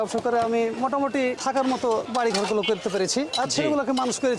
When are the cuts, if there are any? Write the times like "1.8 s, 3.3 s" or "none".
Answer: 1.4 s, 2.1 s